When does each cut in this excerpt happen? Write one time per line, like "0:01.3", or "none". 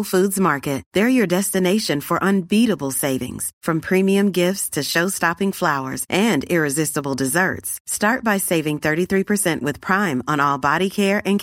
none